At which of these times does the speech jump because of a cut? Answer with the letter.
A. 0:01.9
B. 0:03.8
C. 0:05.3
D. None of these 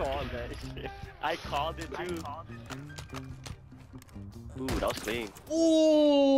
C